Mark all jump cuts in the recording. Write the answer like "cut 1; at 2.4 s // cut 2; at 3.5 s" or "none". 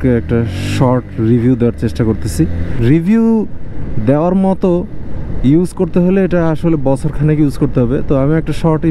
cut 1; at 2.7 s